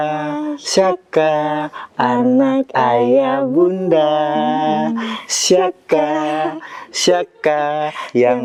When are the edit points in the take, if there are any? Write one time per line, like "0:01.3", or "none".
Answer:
none